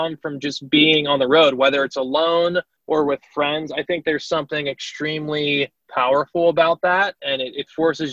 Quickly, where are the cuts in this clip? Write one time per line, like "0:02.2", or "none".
0:02.7
0:05.8